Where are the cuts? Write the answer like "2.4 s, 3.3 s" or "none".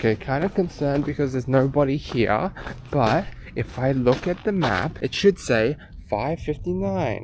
5.0 s